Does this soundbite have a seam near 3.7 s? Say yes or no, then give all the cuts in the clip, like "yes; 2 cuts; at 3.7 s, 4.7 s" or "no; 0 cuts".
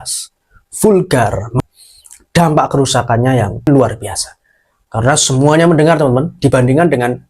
yes; 2 cuts; at 1.5 s, 3.7 s